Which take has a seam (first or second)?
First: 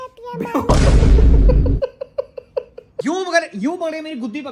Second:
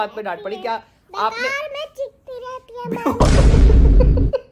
first